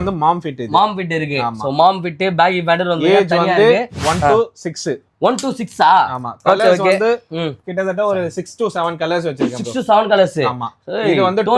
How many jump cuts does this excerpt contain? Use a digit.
0